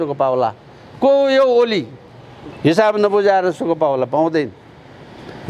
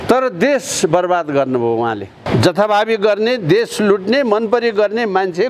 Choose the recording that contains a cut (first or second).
second